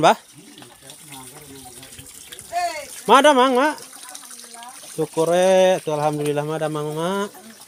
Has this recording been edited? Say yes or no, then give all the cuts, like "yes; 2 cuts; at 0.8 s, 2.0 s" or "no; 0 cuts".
no; 0 cuts